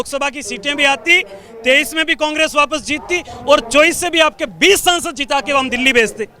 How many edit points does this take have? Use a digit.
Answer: 0